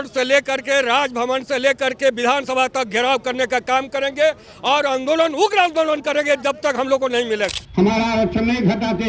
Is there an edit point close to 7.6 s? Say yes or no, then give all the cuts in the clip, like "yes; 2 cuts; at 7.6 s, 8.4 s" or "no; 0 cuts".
yes; 1 cut; at 7.6 s